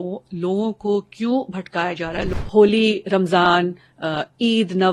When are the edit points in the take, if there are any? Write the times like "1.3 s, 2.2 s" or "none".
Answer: 2.3 s

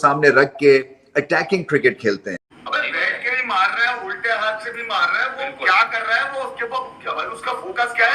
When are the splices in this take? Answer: 2.3 s

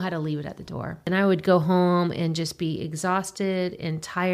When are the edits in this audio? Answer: 1.1 s

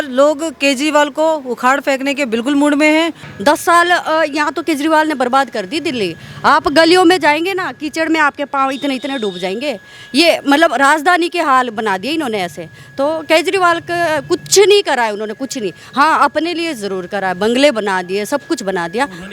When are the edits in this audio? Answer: 3.3 s

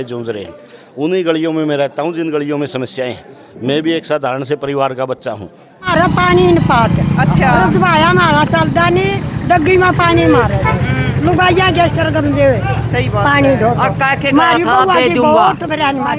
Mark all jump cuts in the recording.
5.9 s

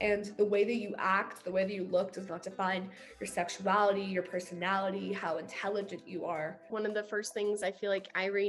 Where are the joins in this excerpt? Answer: 6.7 s

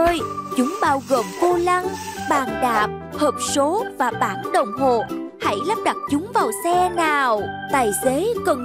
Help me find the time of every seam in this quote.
7.5 s

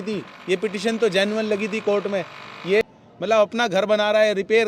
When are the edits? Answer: 2.8 s

